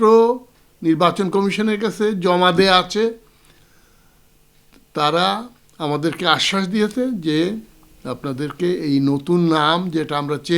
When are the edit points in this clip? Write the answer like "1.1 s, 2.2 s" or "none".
none